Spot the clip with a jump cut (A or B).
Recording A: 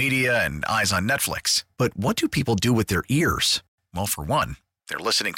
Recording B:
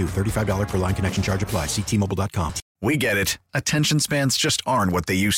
B